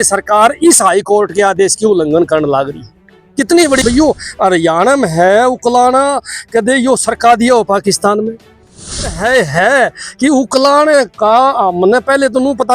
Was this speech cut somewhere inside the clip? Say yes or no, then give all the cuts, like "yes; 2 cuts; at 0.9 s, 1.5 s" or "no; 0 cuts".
yes; 2 cuts; at 3.8 s, 9.1 s